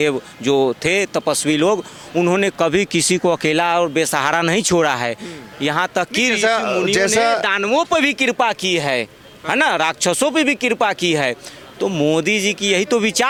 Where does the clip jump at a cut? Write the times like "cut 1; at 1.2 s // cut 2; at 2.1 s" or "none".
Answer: none

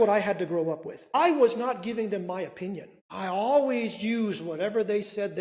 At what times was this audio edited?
cut 1; at 1.2 s // cut 2; at 3.0 s

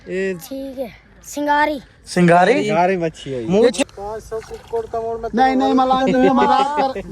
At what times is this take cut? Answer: cut 1; at 3.8 s

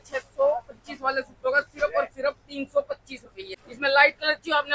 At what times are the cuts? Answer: cut 1; at 3.6 s

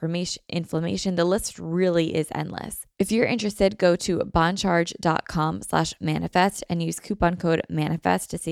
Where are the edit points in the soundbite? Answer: cut 1; at 2.8 s

